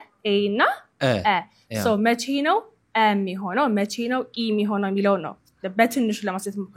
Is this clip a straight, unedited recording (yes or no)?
yes